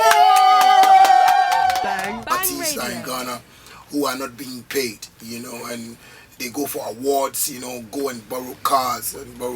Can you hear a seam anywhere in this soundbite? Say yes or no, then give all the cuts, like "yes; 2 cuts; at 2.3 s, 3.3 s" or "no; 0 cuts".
yes; 1 cut; at 2.0 s